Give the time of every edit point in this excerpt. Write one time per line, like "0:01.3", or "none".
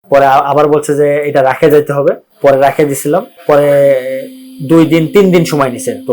0:02.3
0:03.3